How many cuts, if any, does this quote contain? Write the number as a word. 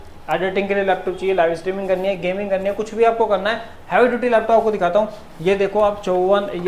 zero